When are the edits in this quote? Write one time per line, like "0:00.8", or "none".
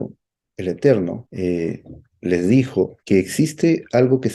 0:01.2
0:03.0